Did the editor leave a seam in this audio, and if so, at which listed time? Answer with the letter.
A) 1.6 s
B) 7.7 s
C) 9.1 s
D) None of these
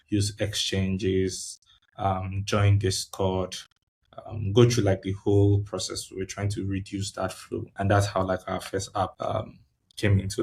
C